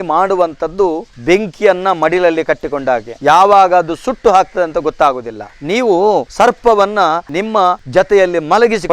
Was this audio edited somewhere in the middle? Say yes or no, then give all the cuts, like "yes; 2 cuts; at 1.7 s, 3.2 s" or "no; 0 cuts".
no; 0 cuts